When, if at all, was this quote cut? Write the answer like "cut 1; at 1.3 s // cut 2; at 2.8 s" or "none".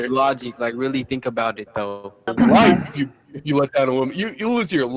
cut 1; at 2.3 s